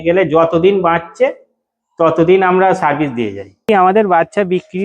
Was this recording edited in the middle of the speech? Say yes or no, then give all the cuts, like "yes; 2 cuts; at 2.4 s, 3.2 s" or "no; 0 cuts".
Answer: yes; 1 cut; at 3.6 s